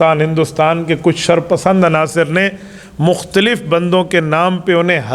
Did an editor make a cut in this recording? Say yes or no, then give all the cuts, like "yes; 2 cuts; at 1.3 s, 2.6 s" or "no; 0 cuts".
no; 0 cuts